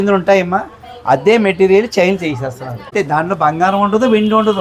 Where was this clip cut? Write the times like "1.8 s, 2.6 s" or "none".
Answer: 2.9 s